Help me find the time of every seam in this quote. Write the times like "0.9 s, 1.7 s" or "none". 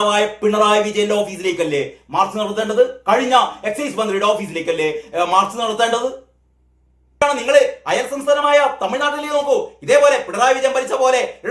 7.2 s